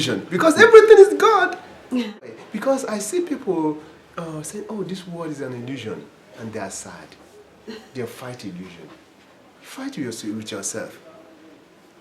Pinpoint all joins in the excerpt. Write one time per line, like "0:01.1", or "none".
0:02.2